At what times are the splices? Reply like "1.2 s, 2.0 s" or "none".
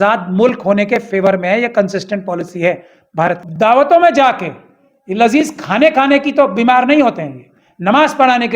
3.4 s